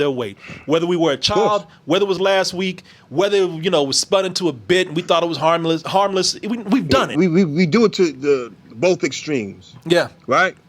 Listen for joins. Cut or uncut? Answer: cut